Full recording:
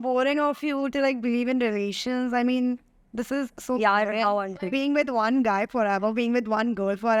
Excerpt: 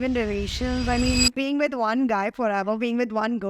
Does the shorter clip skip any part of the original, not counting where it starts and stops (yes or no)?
yes